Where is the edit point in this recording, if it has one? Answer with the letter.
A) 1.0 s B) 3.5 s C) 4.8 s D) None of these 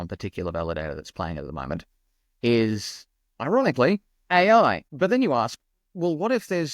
C